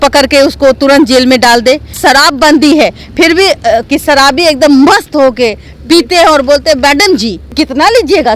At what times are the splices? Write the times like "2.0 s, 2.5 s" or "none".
2.0 s, 3.9 s, 7.4 s